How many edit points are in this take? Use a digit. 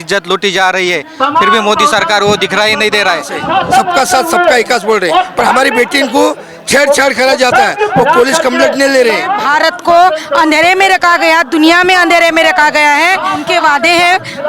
3